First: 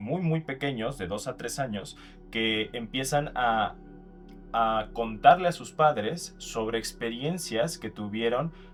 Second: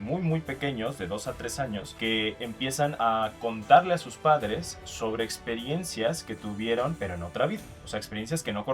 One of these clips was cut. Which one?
second; 3 cuts; at 1.9 s, 2.9 s, 7.0 s

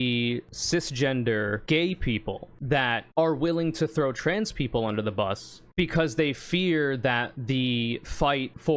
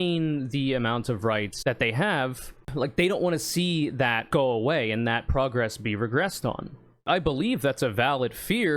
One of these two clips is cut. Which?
second; 1 cut; at 1.5 s

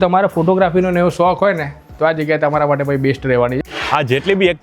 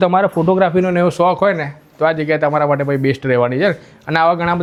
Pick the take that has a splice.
first; 1 cut; at 3.6 s

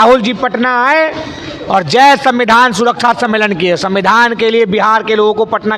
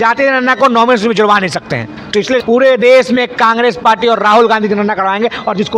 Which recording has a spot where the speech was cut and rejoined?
second; 1 cut; at 2.4 s

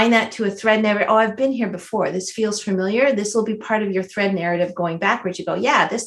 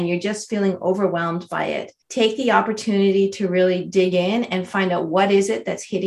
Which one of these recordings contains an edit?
second; 1 cut; at 2.0 s

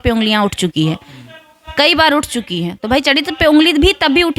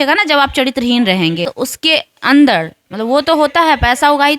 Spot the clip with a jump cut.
second; 1 cut; at 1.5 s

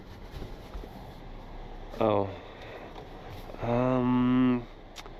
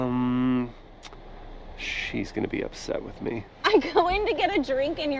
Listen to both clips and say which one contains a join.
second; 1 cut; at 3.5 s

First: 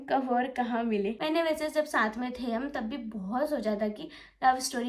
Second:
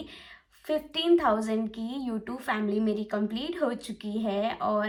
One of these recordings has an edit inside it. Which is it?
first; 1 cut; at 1.2 s

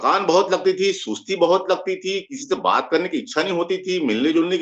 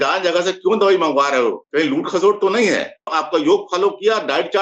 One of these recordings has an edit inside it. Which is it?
second; 2 cuts; at 1.6 s, 3.1 s

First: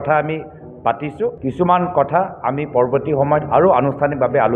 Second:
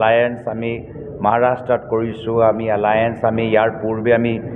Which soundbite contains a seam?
first; 1 cut; at 1.4 s

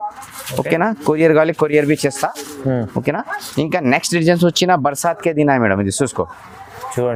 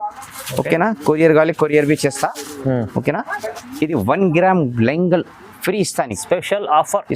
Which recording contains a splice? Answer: second; 1 cut; at 3.4 s

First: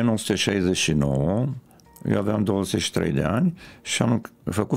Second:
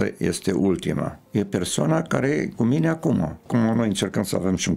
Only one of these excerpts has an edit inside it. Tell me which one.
second; 2 cuts; at 1.2 s, 3.4 s

